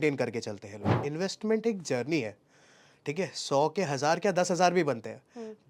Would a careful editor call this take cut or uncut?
cut